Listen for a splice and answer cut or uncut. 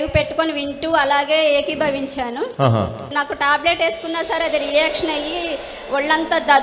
cut